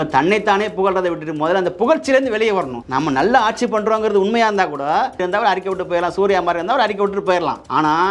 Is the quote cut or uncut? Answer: cut